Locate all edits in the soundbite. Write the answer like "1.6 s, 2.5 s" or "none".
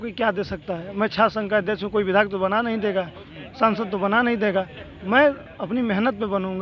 none